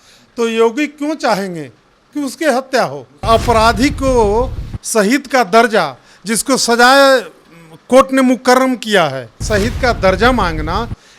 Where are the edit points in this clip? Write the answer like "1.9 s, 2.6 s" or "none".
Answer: 3.2 s, 9.4 s

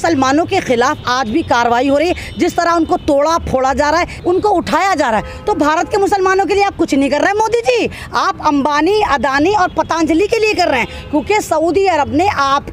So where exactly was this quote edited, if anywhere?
4.2 s

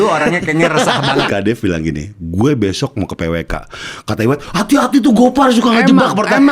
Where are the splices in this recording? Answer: 1.3 s

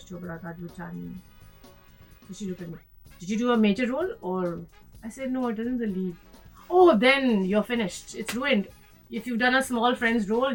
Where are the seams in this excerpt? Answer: none

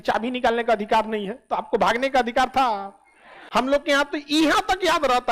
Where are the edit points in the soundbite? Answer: 3.4 s

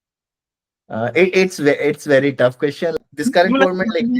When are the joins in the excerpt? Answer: 2.9 s

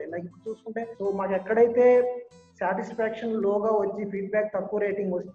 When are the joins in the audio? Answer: 0.9 s

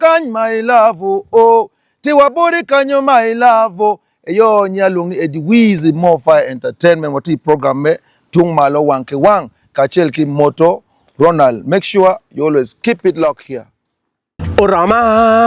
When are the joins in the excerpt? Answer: 14.3 s

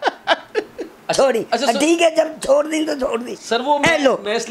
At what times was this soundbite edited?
0.9 s, 3.4 s

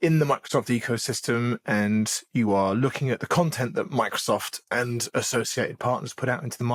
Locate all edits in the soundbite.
none

